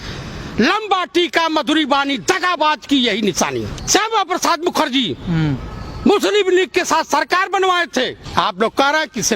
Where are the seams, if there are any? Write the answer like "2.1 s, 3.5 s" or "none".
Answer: 3.8 s